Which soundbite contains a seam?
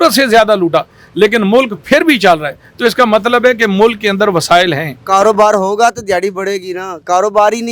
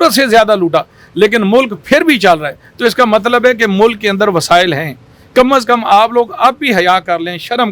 first; 1 cut; at 5.0 s

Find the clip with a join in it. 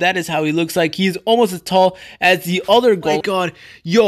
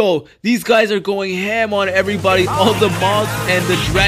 first; 1 cut; at 3.1 s

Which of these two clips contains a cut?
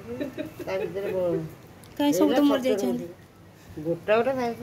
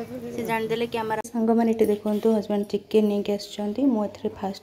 second; 1 cut; at 1.2 s

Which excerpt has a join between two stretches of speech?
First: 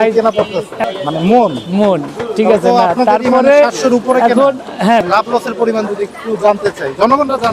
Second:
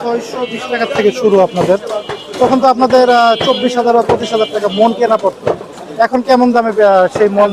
first; 2 cuts; at 0.8 s, 5.1 s

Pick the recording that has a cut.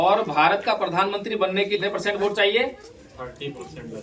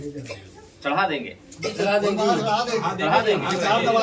first; 1 cut; at 1.8 s

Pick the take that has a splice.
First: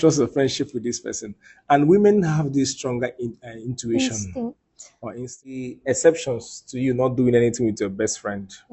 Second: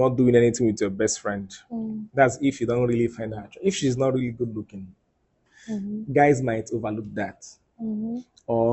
first; 1 cut; at 5.6 s

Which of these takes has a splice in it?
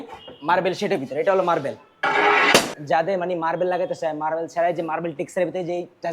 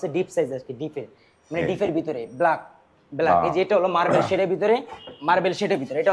first; 1 cut; at 2.8 s

